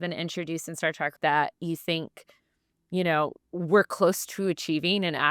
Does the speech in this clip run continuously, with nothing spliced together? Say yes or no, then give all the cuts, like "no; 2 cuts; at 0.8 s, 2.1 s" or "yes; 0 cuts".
no; 1 cut; at 1.1 s